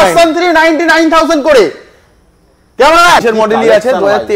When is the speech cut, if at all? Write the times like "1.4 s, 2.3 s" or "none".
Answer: 3.2 s